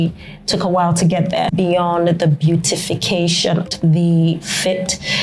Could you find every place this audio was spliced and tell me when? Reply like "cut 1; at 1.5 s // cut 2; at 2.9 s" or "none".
cut 1; at 1.5 s // cut 2; at 3.7 s